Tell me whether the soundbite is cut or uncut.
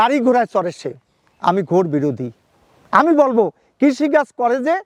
uncut